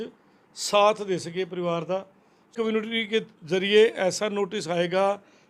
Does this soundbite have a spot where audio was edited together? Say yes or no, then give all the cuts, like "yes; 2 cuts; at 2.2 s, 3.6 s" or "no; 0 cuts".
yes; 1 cut; at 2.5 s